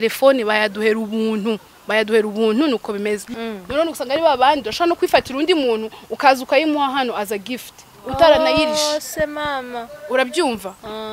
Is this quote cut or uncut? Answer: cut